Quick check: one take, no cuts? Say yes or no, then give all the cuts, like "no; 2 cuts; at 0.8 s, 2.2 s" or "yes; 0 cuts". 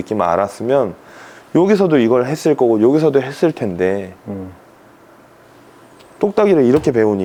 yes; 0 cuts